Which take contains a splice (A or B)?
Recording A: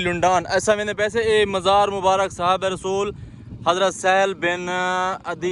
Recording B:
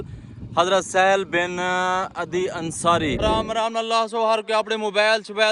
B